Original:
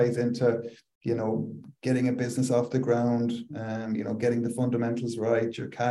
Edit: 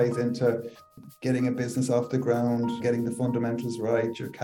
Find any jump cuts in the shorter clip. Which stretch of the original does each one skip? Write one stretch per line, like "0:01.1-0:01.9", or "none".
0:00.9-0:01.5
0:03.4-0:04.2